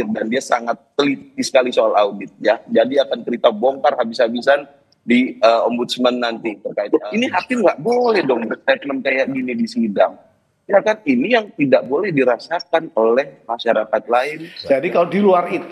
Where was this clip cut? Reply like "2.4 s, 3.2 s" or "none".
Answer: 6.7 s, 14.5 s